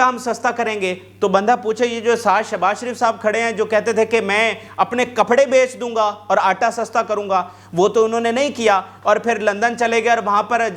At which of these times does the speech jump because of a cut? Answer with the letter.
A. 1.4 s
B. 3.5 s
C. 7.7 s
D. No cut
D